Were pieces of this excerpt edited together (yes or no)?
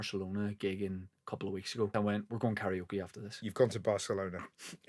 yes